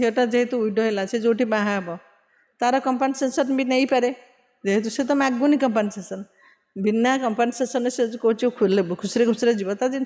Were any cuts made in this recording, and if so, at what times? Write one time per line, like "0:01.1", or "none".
none